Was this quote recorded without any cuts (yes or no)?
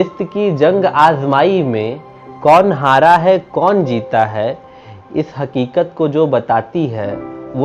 yes